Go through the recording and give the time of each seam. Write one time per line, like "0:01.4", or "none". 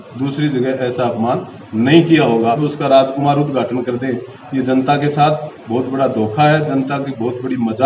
0:02.6

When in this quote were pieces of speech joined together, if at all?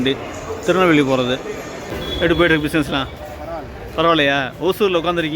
0:01.9

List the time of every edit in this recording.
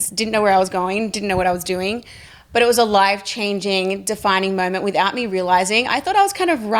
none

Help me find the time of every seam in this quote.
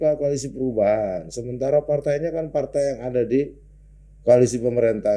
none

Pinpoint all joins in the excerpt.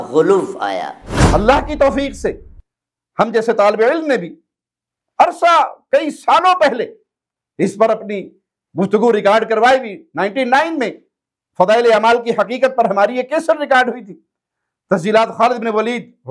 0:01.1

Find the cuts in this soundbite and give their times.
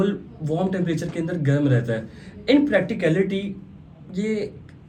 none

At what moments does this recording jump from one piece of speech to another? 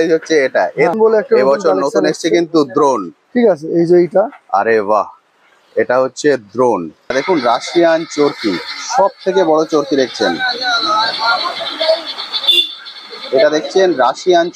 0:00.9
0:07.1

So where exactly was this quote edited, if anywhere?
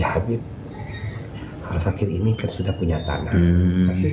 none

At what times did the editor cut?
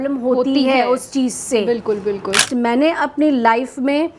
0:02.4

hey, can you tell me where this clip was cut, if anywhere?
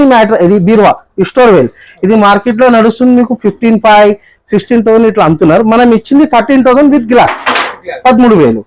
none

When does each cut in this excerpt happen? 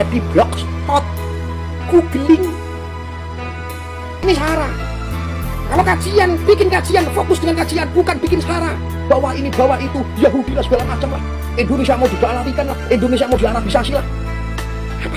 0:04.2

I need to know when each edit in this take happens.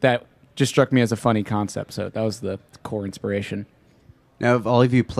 0:02.7

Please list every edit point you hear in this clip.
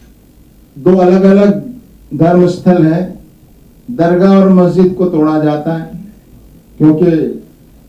none

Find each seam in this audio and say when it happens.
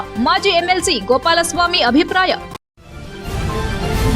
0:02.5

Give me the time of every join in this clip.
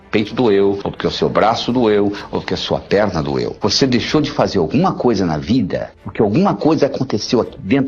0:00.9
0:03.5

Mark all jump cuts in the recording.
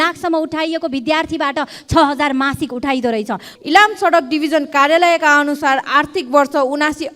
0:03.5

